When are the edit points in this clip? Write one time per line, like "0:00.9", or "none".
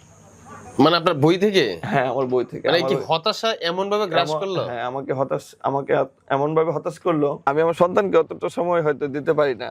0:07.5